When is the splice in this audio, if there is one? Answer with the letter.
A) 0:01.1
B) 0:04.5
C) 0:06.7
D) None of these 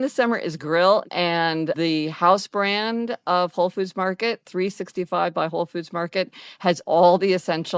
A